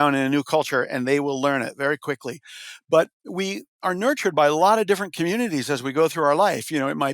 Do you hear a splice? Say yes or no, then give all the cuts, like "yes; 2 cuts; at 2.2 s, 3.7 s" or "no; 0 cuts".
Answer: no; 0 cuts